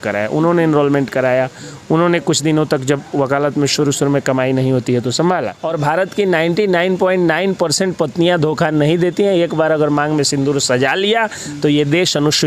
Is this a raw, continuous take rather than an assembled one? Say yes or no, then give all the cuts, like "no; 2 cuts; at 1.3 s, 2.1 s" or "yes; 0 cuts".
no; 1 cut; at 5.6 s